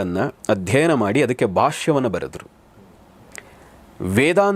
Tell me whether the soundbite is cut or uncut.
uncut